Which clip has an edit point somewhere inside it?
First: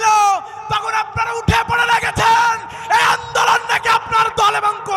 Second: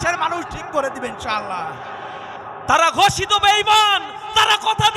second; 1 cut; at 2.5 s

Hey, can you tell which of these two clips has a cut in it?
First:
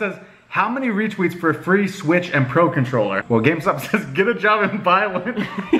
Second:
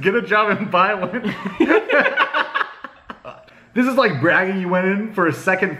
second; 1 cut; at 3.4 s

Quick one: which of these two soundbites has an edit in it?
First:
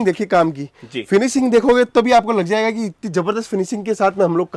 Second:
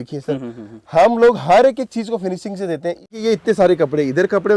second; 1 cut; at 3.2 s

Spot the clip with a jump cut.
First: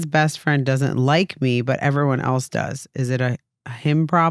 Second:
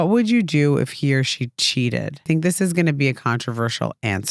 second; 1 cut; at 2.2 s

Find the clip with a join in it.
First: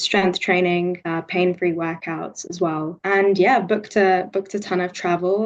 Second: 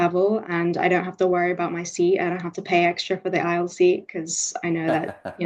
first; 2 cuts; at 1.0 s, 3.0 s

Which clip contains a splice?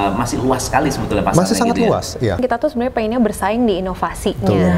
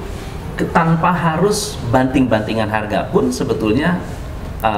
first; 1 cut; at 2.4 s

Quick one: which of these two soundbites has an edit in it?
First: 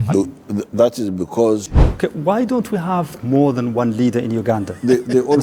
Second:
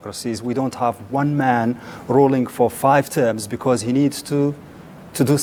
first; 1 cut; at 1.7 s

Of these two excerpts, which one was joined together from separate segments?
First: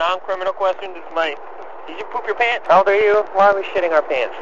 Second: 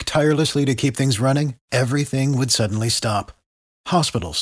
first; 1 cut; at 2.6 s

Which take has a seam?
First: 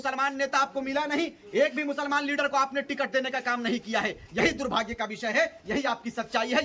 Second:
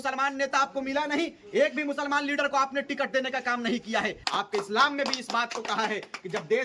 second; 1 cut; at 4.2 s

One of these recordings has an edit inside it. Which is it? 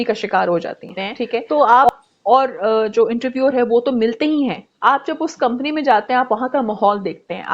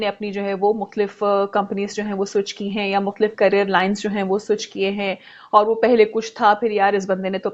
first; 1 cut; at 1.4 s

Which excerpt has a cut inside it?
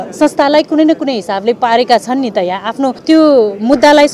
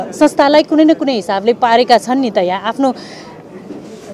first; 1 cut; at 3.0 s

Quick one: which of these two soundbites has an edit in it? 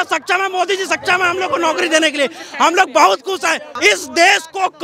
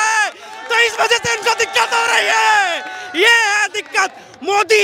first; 1 cut; at 3.7 s

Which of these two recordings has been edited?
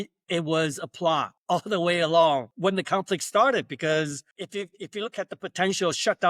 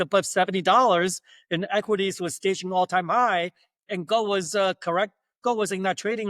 first; 3 cuts; at 1.3 s, 2.5 s, 4.3 s

